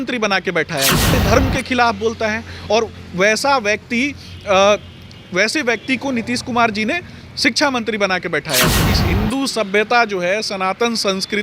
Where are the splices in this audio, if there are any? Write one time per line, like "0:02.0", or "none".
0:01.1
0:08.9